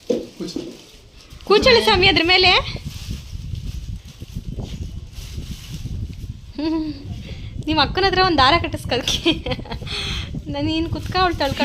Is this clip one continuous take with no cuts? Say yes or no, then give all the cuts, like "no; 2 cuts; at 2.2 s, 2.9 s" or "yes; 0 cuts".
yes; 0 cuts